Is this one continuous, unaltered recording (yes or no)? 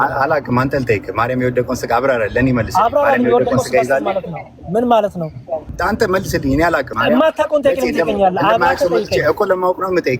no